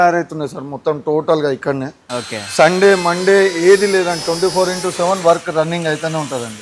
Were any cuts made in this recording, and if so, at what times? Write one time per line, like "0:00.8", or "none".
none